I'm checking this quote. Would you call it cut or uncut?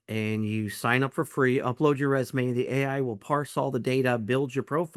uncut